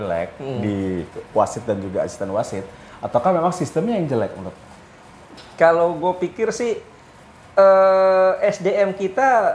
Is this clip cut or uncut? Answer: uncut